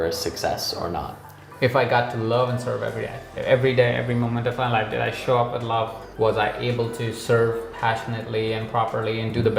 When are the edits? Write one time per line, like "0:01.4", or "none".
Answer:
0:03.3
0:06.0